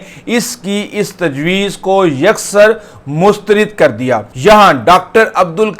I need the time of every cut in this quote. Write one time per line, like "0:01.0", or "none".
0:04.3